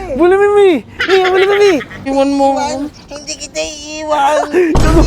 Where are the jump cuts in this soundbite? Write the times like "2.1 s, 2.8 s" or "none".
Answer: 2.0 s